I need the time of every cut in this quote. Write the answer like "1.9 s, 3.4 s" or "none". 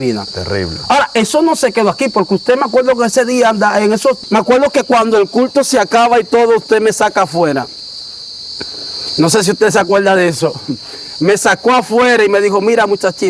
4.2 s

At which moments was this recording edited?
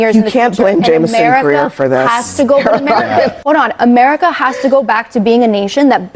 3.4 s

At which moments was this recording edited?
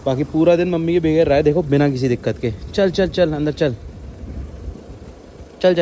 none

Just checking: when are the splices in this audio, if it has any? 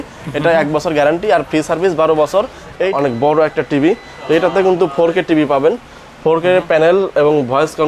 2.9 s

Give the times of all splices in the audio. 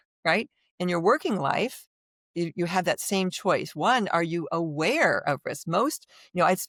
none

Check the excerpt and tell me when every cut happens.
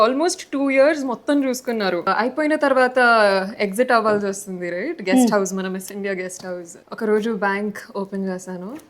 2.0 s, 6.8 s

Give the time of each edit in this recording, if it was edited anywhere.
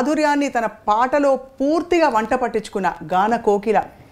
none

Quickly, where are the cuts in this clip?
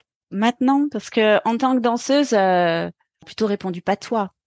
3.3 s

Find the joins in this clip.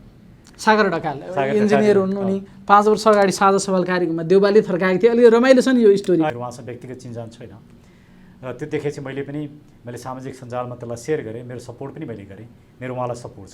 6.4 s

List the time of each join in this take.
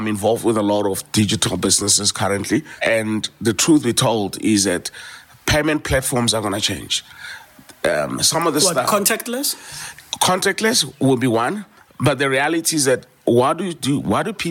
2.7 s

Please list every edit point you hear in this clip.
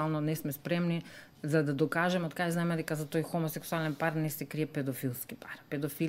none

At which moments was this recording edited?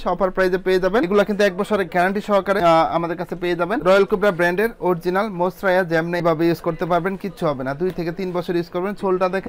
1.1 s, 3.8 s

